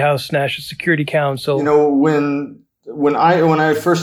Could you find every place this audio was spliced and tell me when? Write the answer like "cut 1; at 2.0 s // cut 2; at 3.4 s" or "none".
cut 1; at 1.6 s